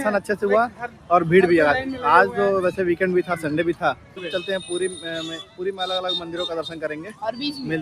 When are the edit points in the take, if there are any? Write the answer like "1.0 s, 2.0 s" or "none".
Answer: 4.3 s